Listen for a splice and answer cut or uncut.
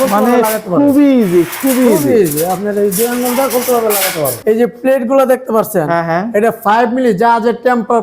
cut